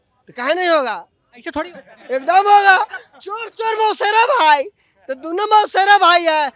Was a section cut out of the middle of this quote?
no; 0 cuts

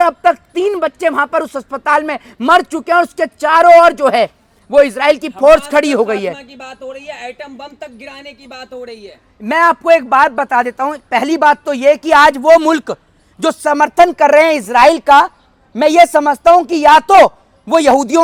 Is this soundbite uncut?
yes; 0 cuts

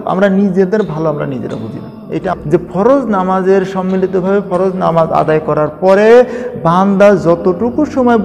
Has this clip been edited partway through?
yes; 1 cut; at 2.3 s

